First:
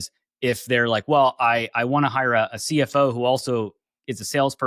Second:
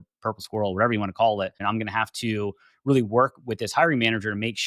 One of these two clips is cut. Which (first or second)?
second